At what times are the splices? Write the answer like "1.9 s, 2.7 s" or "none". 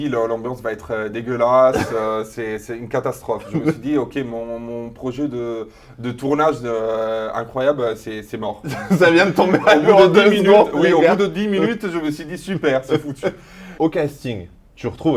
none